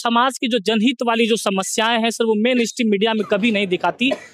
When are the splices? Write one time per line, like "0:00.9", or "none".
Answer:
none